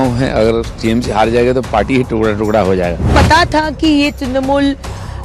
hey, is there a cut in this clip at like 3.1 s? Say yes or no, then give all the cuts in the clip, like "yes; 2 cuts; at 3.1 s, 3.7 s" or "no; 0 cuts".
yes; 1 cut; at 3.1 s